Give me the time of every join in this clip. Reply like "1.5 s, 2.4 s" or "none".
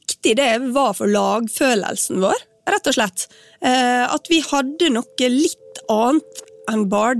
none

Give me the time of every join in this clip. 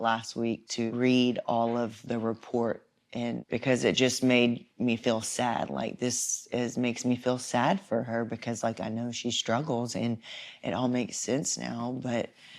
0.9 s, 2.0 s, 3.4 s

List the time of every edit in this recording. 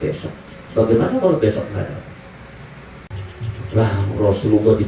3.1 s

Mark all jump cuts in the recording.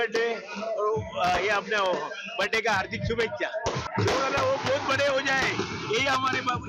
3.8 s

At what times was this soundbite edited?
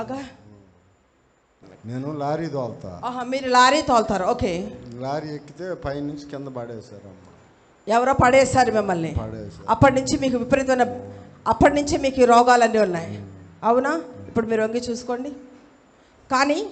1.6 s

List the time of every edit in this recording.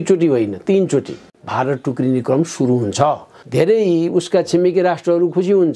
1.4 s, 3.4 s

